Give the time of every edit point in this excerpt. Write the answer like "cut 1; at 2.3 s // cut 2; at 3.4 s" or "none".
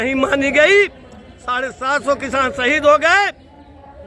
none